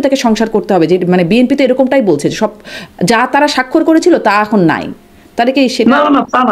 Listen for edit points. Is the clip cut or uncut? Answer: uncut